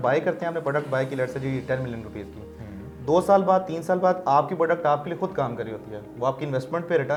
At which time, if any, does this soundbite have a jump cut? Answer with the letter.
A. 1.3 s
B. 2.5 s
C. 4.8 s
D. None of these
D